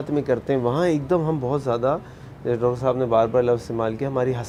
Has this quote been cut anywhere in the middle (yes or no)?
no